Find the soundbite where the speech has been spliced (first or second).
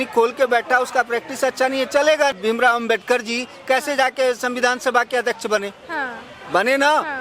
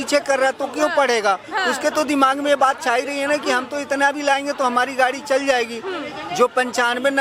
first